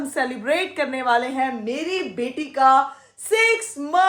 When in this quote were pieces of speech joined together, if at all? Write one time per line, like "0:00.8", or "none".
none